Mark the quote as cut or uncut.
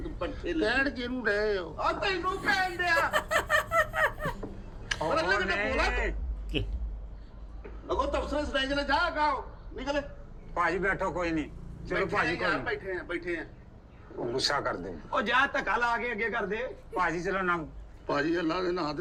uncut